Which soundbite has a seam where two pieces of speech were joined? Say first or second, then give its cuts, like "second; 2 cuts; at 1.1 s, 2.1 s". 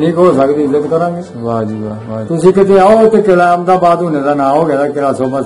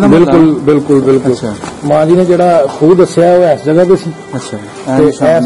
first; 1 cut; at 2.2 s